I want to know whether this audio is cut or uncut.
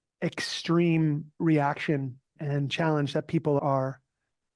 cut